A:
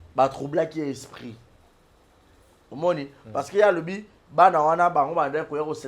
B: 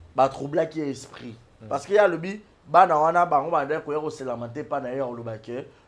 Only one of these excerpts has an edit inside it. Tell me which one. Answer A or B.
B